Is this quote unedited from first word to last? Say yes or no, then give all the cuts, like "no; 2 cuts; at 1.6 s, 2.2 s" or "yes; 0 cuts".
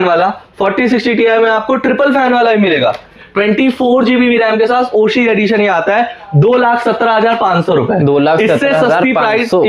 no; 1 cut; at 3.2 s